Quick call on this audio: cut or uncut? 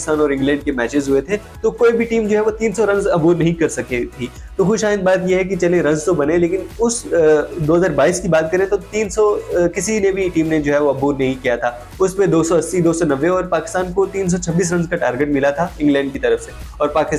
uncut